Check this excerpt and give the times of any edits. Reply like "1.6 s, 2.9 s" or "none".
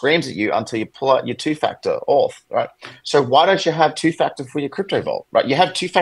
none